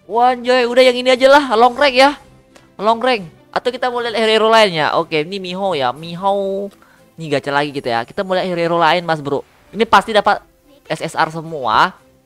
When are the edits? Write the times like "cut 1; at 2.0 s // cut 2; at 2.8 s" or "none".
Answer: cut 1; at 3.4 s